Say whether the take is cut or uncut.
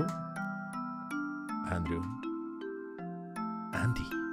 uncut